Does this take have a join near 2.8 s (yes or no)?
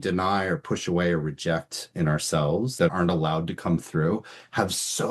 yes